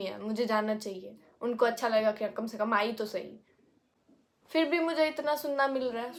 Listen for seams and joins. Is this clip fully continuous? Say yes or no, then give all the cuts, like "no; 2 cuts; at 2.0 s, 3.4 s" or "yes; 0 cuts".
yes; 0 cuts